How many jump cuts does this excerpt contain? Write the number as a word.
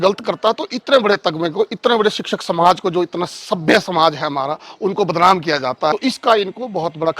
one